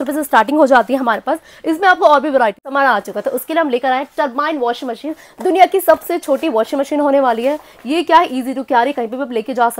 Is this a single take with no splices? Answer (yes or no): no